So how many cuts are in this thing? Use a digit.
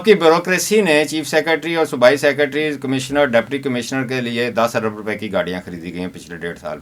0